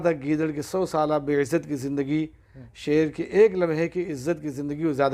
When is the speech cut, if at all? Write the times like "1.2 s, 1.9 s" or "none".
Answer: none